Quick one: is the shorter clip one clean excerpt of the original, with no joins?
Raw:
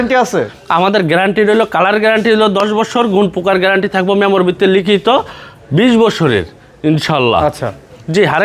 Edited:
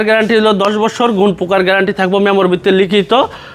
yes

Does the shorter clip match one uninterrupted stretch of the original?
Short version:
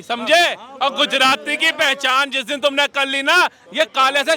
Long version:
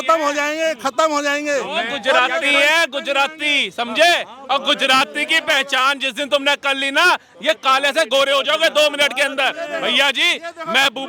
yes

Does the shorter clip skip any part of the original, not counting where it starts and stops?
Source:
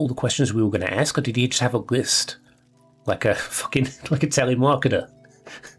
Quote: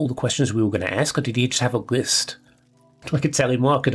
yes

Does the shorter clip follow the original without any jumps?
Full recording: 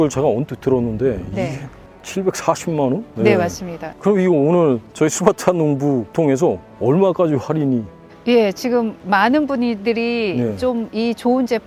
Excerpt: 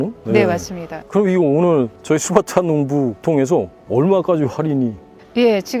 yes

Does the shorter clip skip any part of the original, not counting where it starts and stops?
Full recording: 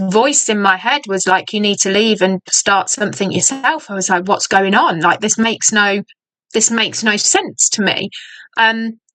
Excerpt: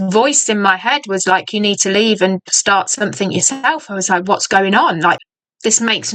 yes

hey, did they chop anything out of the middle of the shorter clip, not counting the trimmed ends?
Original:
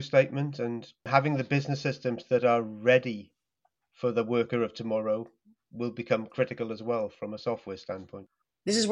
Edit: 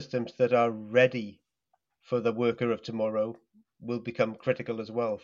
no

